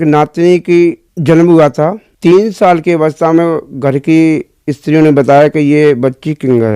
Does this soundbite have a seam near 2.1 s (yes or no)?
yes